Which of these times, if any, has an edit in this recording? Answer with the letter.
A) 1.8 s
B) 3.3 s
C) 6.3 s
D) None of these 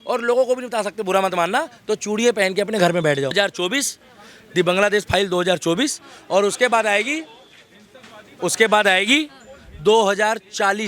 B